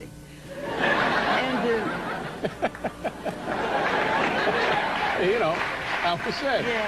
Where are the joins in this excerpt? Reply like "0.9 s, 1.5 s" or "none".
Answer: 2.5 s